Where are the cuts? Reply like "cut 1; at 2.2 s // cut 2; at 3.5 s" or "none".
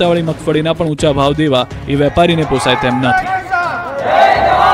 cut 1; at 3.5 s